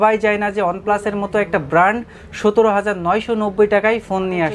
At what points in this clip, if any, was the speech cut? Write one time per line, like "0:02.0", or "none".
none